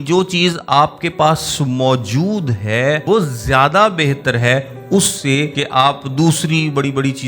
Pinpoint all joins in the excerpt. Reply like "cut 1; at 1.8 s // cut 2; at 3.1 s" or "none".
cut 1; at 3.0 s // cut 2; at 5.6 s